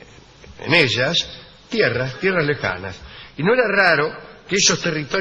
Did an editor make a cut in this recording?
no; 0 cuts

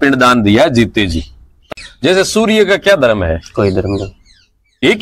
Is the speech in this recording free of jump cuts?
no; 1 cut; at 1.7 s

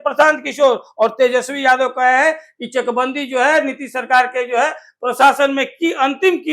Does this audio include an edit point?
no; 0 cuts

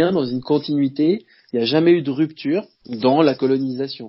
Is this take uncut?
no; 1 cut; at 2.8 s

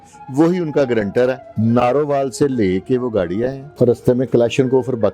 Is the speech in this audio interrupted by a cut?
yes; 2 cuts; at 1.5 s, 3.6 s

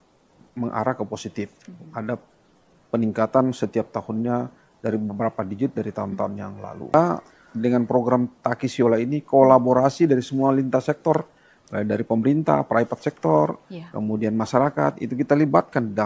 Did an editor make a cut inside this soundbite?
yes; 1 cut; at 6.9 s

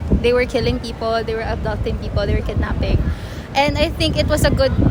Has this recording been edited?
no; 0 cuts

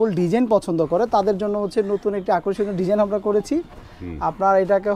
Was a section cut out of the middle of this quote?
no; 0 cuts

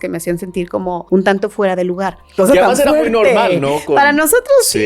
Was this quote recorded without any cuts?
no; 2 cuts; at 1.0 s, 2.3 s

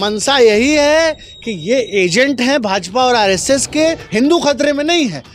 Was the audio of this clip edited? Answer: yes; 1 cut; at 4.0 s

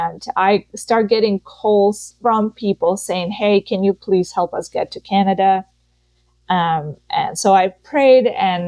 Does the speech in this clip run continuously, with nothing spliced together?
yes; 0 cuts

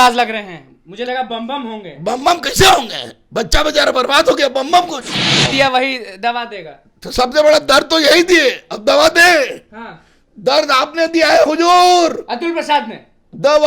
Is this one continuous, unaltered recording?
no; 1 cut; at 5.5 s

